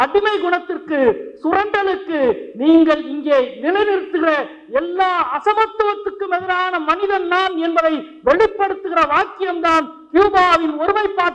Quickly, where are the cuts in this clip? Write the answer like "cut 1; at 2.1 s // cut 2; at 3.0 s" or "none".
none